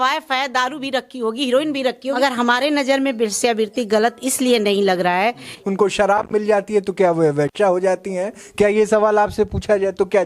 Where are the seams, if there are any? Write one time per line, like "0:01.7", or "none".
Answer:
0:02.2
0:05.6